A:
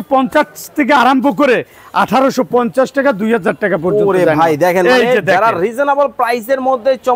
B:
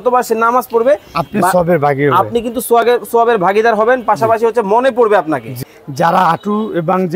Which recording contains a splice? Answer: B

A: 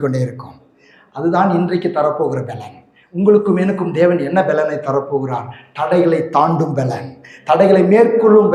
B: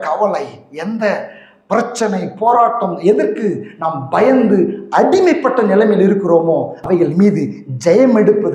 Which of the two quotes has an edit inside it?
B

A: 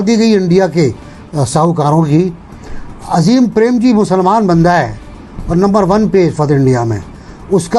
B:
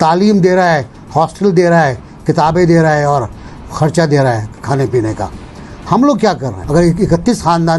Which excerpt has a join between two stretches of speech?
B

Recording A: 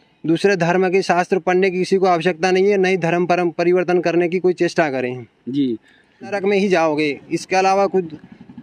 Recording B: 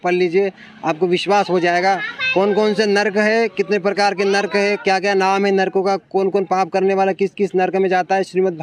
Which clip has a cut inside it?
A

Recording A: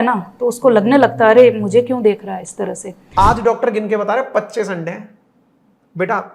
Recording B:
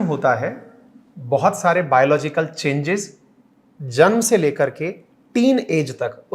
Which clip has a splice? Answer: A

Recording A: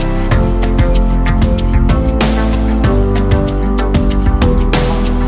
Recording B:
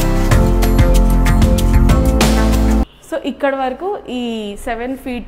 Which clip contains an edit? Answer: B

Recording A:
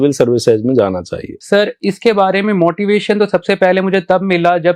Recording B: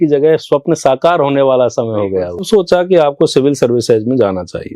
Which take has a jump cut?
B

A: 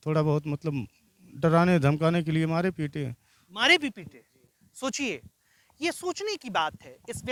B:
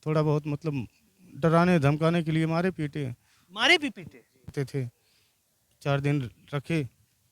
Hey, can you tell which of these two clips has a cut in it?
B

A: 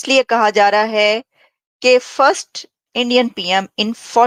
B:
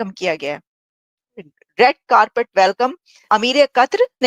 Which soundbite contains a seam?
B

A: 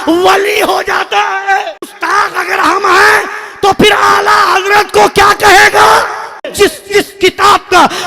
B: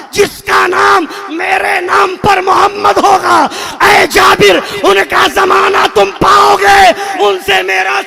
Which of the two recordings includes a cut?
A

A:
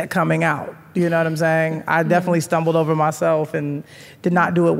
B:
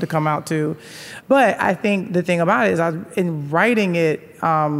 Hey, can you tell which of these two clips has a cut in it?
B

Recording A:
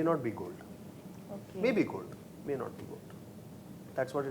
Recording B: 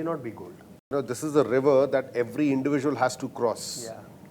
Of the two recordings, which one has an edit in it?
B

